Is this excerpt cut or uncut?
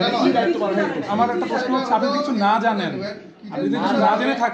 uncut